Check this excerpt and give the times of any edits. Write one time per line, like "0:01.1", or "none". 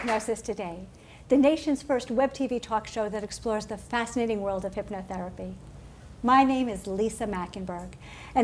none